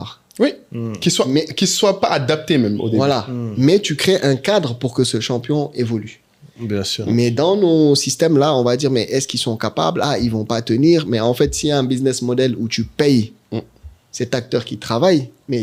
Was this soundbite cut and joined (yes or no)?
no